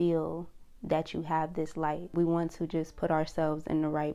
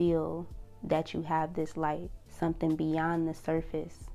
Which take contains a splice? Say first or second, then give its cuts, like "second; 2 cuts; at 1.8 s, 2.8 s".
first; 1 cut; at 2.0 s